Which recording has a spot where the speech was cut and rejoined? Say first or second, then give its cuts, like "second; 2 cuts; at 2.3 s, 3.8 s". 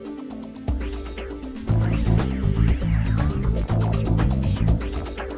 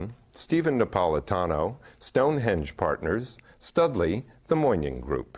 second; 1 cut; at 4.3 s